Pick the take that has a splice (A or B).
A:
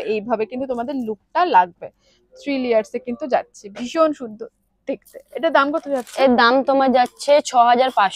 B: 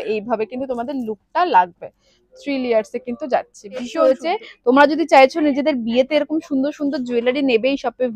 B